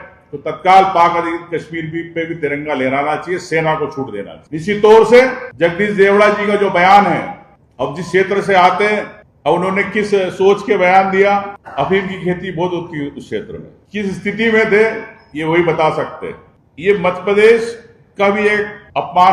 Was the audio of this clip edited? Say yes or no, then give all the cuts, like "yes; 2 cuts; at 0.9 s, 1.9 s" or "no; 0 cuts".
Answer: no; 0 cuts